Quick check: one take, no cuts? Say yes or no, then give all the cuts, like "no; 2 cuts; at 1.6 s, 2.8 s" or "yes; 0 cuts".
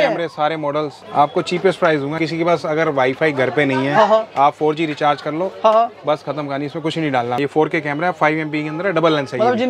no; 3 cuts; at 1.0 s, 2.2 s, 7.4 s